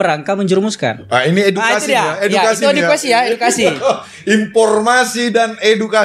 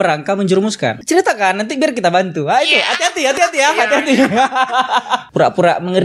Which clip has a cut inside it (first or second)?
second